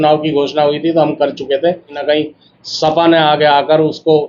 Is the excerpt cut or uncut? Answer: cut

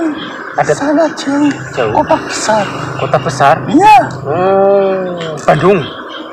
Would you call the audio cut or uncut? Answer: uncut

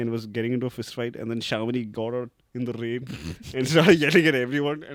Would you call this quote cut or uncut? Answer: uncut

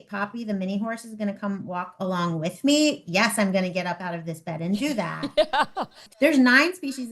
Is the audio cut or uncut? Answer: cut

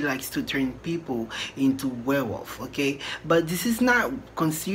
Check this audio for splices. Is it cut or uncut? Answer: uncut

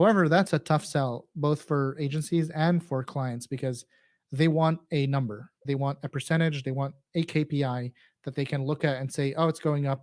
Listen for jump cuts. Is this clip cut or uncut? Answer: uncut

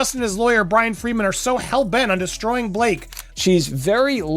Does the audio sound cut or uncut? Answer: cut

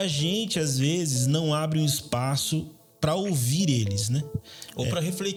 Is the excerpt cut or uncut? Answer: uncut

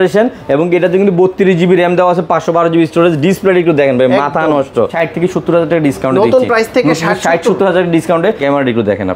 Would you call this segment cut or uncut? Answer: cut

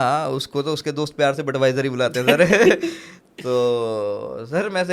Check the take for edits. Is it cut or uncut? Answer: uncut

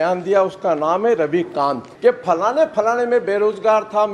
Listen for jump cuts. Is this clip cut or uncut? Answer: cut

